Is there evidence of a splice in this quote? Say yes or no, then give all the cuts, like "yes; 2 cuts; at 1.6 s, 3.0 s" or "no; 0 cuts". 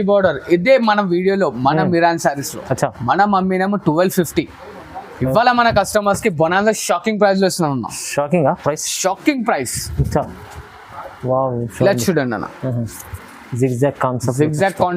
no; 0 cuts